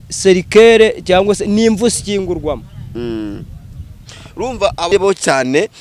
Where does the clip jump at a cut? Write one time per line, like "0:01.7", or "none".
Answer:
0:04.9